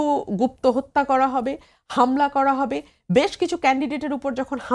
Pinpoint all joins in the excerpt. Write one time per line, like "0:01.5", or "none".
none